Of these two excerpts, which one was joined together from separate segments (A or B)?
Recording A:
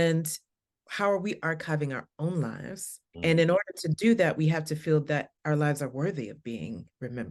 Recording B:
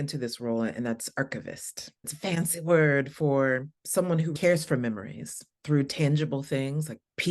B